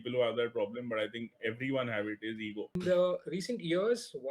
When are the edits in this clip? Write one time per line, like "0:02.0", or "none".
0:02.8

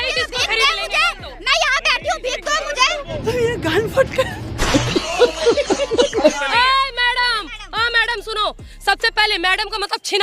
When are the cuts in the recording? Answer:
0:03.1
0:04.5
0:06.4
0:08.7

